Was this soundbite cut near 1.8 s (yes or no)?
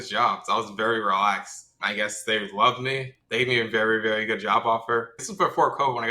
yes